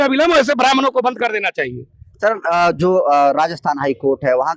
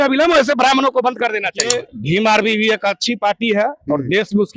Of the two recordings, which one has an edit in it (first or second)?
second